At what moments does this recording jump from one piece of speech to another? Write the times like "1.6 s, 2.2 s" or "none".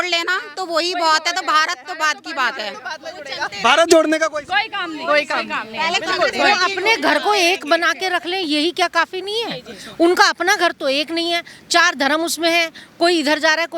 none